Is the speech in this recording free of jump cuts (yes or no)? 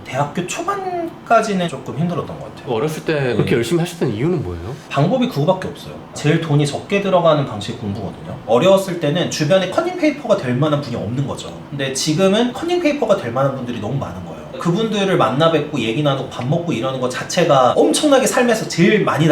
no